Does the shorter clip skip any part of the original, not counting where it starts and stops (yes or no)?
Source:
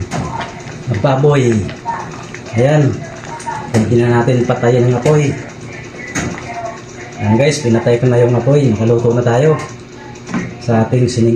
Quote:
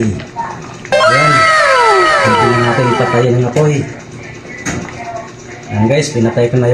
no